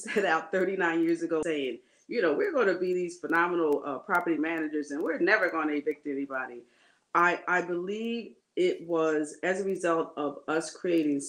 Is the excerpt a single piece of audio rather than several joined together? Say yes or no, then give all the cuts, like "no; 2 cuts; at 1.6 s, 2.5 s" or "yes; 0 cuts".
no; 1 cut; at 1.4 s